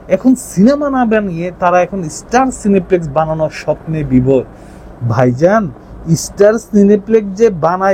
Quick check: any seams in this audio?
no; 0 cuts

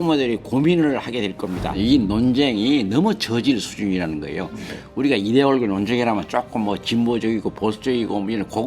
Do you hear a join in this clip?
yes; 1 cut; at 1.7 s

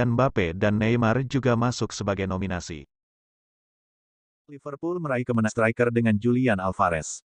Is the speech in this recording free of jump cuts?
no; 1 cut; at 5.5 s

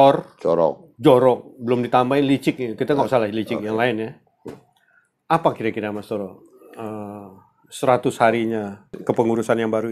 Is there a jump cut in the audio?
yes; 1 cut; at 9.0 s

